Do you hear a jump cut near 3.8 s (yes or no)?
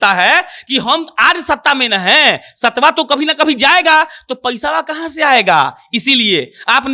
no